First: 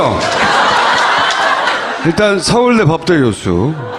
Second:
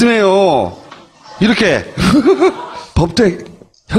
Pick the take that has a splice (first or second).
second